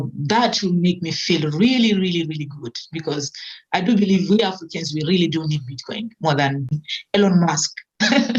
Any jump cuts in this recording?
yes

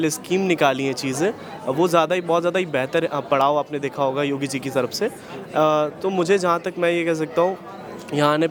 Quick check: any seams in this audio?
no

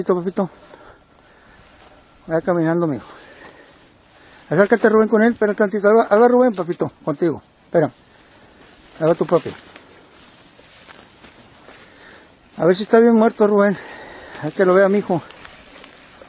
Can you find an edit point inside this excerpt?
yes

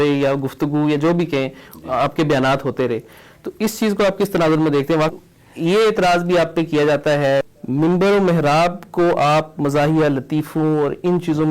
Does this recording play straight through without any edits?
no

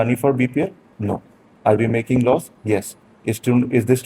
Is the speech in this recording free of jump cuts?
yes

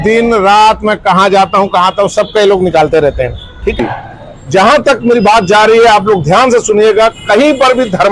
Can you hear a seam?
yes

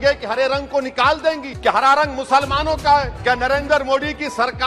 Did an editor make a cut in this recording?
yes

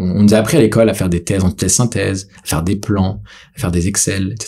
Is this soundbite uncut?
yes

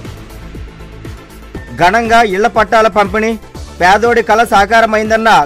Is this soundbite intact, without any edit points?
no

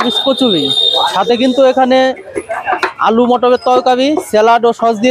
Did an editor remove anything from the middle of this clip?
no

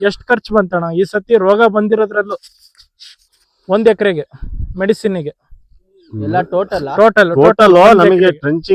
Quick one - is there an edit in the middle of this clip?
no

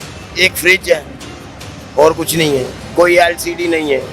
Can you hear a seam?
no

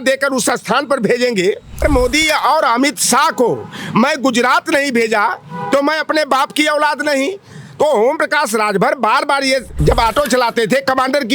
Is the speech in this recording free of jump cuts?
no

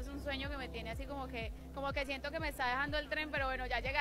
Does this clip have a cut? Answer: no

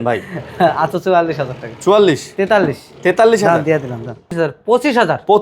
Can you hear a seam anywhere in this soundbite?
yes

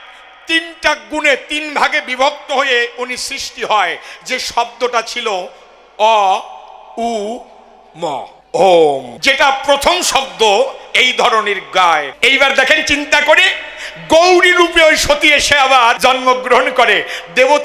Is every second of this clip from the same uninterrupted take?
no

